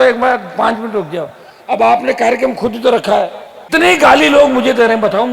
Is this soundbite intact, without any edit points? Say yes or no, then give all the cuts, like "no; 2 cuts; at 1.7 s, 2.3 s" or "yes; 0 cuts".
no; 1 cut; at 3.7 s